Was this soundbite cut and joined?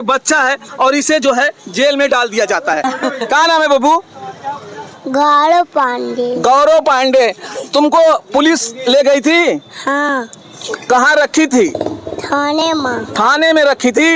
no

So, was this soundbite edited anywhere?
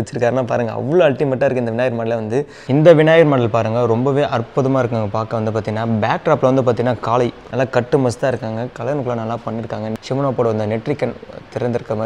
yes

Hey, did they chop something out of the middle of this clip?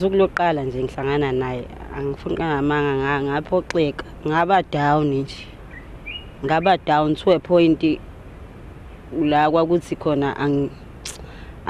no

